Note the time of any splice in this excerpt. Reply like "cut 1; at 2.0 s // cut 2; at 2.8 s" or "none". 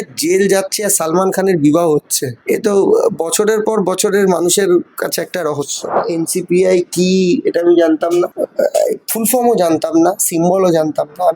cut 1; at 6.0 s